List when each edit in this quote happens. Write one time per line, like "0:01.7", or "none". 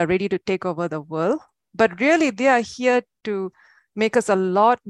none